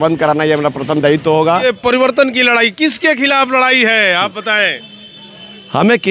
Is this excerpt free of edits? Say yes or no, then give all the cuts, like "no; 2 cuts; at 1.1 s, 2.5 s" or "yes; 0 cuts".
no; 1 cut; at 1.6 s